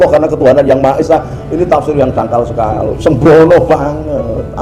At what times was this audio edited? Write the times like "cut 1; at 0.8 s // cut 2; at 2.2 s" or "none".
cut 1; at 3.0 s